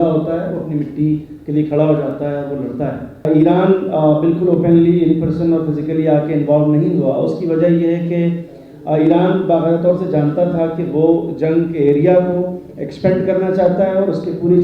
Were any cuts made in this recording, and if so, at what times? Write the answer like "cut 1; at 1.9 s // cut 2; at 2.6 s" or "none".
cut 1; at 3.2 s